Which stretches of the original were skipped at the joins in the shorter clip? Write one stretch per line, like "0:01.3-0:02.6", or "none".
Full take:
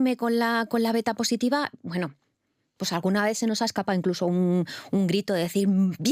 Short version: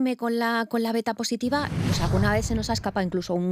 0:01.8-0:02.7

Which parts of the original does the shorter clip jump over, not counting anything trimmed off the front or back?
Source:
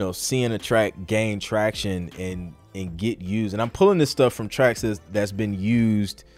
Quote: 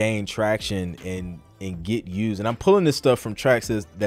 none

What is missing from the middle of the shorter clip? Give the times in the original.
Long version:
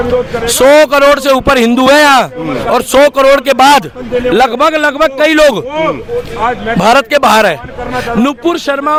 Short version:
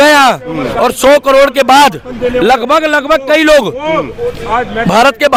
none

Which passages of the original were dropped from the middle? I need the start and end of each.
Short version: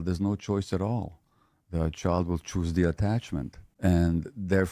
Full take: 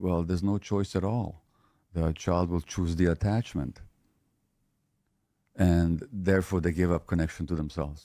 0:03.8-0:05.4

